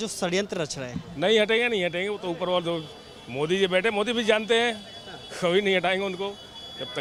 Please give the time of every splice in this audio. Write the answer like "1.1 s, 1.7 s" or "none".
none